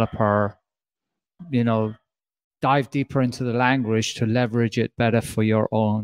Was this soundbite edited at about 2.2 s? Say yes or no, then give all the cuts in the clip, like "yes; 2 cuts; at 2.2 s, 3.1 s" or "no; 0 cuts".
no; 0 cuts